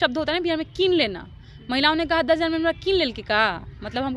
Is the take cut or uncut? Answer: uncut